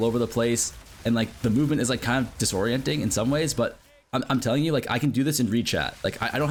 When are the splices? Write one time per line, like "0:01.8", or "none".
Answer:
none